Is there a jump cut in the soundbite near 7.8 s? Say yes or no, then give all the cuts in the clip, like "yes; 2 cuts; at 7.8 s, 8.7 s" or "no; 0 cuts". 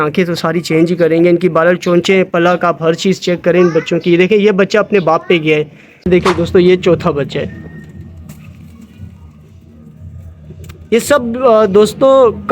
no; 1 cut; at 6.1 s